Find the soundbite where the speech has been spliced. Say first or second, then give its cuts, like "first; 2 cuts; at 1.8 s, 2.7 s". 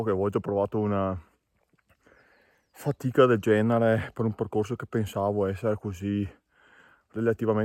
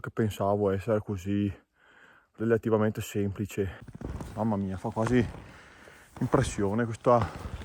second; 1 cut; at 3.8 s